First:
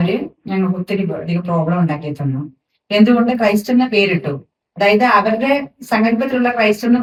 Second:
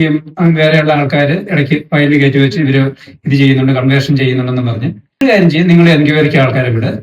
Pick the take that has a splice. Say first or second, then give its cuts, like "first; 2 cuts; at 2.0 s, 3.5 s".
second; 1 cut; at 5.0 s